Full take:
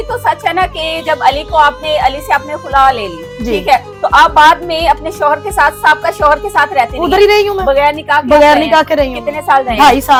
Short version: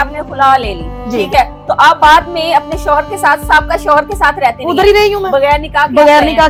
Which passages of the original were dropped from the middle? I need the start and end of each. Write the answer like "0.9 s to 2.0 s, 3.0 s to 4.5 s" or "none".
none